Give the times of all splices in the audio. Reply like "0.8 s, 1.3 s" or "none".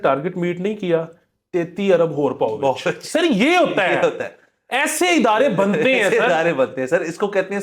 none